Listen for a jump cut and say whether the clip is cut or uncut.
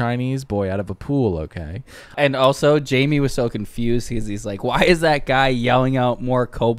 cut